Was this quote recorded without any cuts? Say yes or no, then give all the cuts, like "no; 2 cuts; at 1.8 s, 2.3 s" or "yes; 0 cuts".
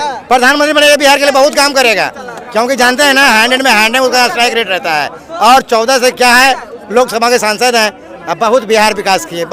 yes; 0 cuts